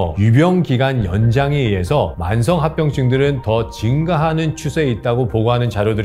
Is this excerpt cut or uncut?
uncut